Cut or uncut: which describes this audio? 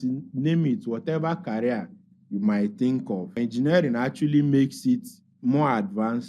cut